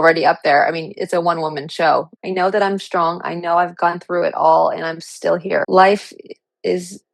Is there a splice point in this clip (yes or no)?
yes